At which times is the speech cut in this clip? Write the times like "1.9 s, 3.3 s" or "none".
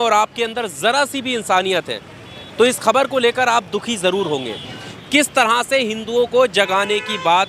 4.9 s